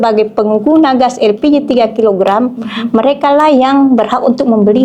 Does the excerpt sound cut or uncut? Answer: uncut